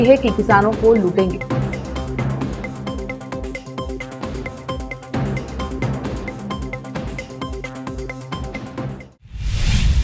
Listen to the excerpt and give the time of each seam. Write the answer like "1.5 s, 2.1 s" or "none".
9.1 s